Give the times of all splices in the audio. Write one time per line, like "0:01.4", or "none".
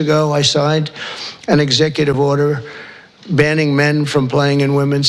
none